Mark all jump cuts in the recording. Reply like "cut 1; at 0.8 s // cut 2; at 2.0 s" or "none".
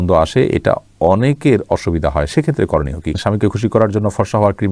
cut 1; at 3.1 s